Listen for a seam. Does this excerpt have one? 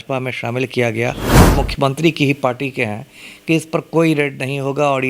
yes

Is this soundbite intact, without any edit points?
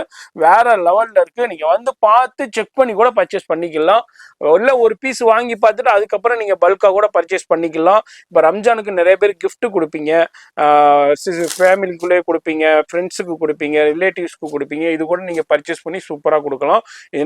yes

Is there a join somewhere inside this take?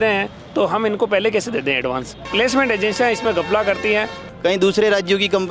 yes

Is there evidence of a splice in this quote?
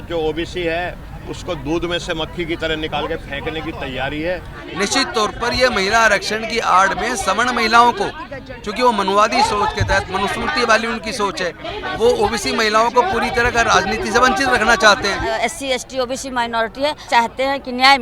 yes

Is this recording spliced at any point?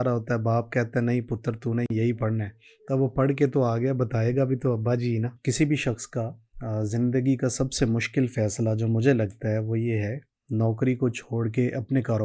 no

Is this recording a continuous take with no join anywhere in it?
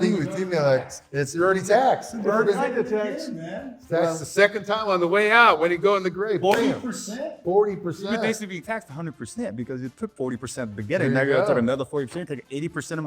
yes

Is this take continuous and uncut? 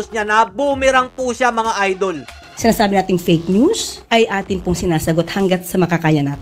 no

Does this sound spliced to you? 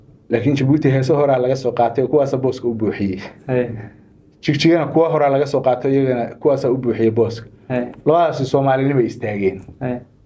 no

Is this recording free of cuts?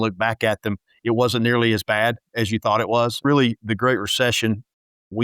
no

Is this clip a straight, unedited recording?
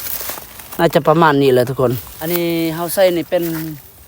no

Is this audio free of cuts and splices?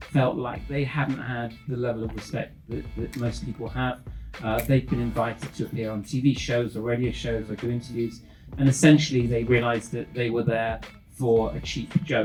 yes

